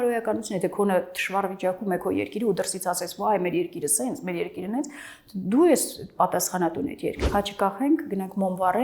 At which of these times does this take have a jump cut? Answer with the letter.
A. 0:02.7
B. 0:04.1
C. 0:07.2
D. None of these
C